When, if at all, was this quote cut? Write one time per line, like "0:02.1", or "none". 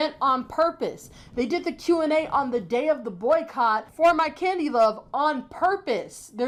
none